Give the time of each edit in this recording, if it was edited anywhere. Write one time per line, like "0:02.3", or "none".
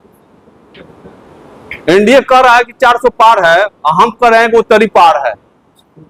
none